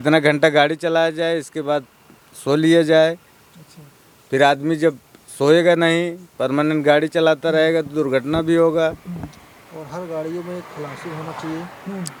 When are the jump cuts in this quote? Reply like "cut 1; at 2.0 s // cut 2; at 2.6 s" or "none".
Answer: none